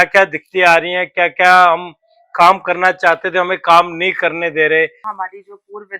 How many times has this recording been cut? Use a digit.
1